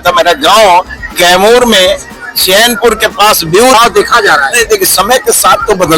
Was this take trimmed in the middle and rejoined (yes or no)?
yes